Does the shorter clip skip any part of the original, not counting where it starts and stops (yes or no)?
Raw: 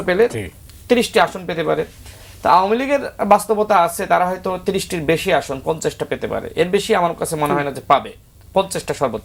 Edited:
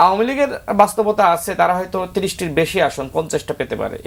no